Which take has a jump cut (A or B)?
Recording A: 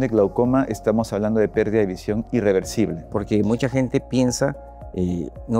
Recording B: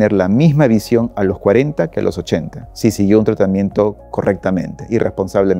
A